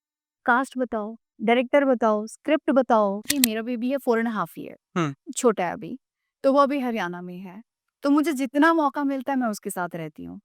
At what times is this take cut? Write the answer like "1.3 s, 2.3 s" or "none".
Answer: 3.3 s